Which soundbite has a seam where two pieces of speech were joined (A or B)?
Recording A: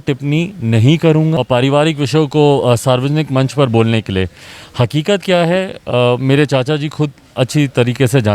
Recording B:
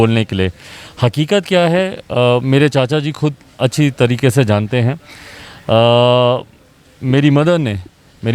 A